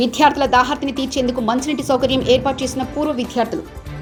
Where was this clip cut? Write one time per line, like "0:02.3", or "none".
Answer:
none